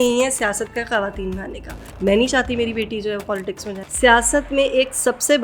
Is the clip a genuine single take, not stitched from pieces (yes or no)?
no